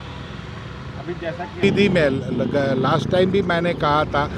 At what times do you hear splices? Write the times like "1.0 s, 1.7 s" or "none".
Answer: 1.6 s